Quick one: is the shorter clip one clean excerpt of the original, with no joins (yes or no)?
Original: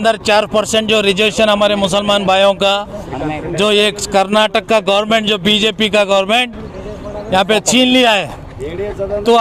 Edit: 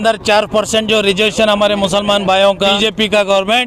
no